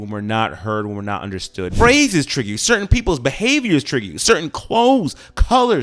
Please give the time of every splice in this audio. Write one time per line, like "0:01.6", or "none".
0:01.7